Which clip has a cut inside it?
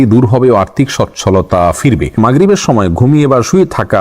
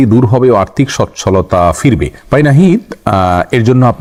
first; 1 cut; at 2.2 s

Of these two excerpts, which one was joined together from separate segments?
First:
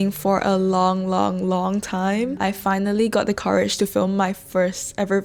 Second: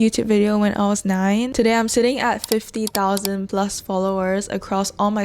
second; 1 cut; at 1.5 s

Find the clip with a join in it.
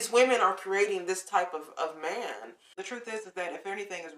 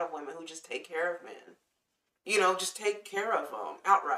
first; 1 cut; at 2.7 s

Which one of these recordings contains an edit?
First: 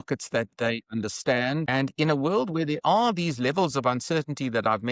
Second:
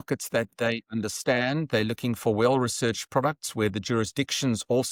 first; 1 cut; at 1.7 s

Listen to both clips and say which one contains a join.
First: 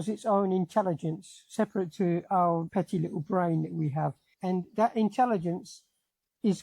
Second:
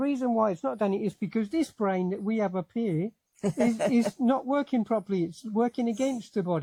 first; 2 cuts; at 2.7 s, 4.2 s

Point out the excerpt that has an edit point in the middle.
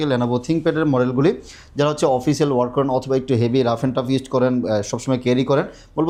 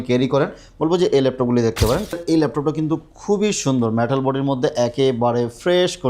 second; 1 cut; at 2.2 s

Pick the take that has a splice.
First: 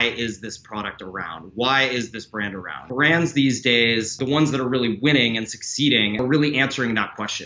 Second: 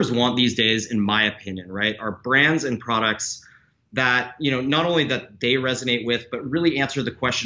first; 3 cuts; at 2.7 s, 4.2 s, 6.2 s

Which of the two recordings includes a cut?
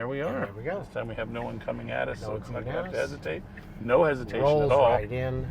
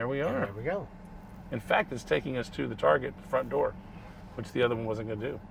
first; 1 cut; at 1.0 s

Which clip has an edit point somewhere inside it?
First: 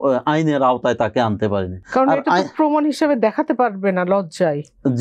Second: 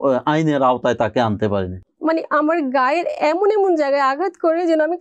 second; 1 cut; at 1.8 s

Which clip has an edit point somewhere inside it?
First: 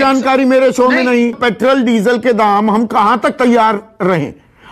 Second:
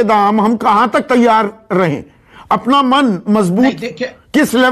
first; 1 cut; at 1.4 s

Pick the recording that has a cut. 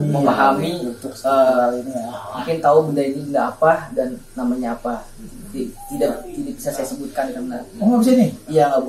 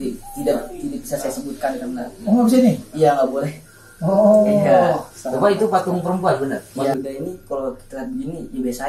second; 1 cut; at 6.9 s

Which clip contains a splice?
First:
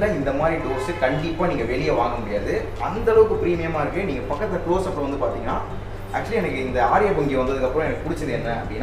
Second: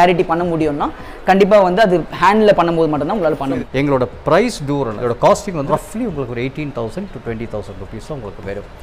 second; 3 cuts; at 3.6 s, 5.0 s, 5.7 s

